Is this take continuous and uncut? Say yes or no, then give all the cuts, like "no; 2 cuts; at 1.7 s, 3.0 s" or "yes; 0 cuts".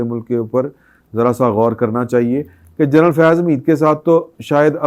yes; 0 cuts